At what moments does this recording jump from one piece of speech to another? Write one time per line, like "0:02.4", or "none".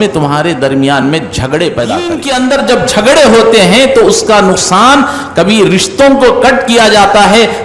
0:02.2